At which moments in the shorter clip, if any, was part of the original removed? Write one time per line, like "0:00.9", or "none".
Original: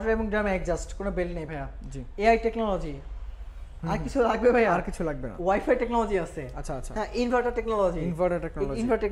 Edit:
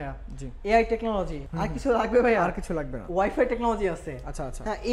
0:01.4